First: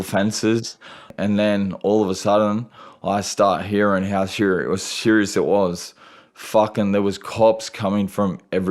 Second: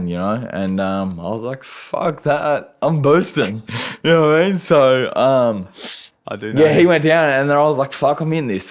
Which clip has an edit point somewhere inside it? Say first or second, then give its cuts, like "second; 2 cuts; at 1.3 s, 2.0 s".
first; 1 cut; at 1.1 s